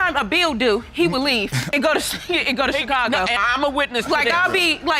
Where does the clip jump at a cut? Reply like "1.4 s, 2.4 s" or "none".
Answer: none